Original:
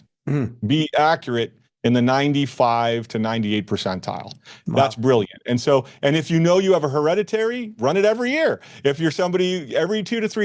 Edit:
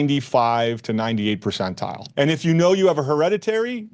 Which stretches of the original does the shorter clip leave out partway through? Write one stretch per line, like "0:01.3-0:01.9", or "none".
0:04.3-0:05.9